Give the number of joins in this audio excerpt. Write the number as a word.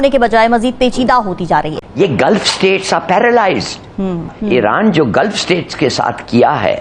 two